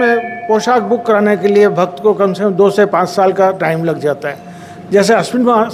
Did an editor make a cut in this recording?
no; 0 cuts

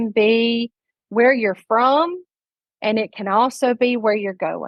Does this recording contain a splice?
no; 0 cuts

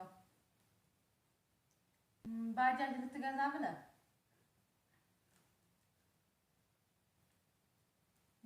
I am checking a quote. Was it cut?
yes; 1 cut; at 2.3 s

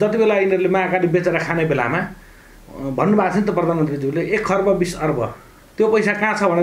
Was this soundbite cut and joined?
no; 0 cuts

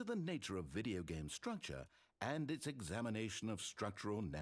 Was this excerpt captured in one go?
yes; 0 cuts

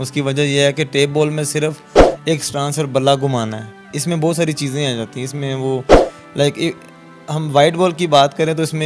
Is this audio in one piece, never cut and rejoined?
yes; 0 cuts

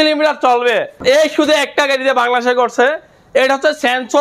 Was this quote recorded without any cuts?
no; 1 cut; at 0.9 s

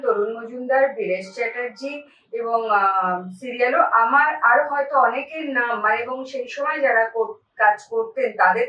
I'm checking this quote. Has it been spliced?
no; 0 cuts

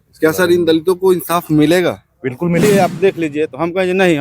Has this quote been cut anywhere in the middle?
yes; 1 cut; at 2.6 s

